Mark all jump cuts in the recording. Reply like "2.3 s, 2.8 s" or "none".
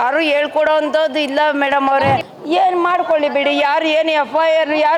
2.3 s